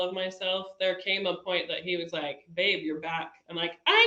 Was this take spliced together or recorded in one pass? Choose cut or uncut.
uncut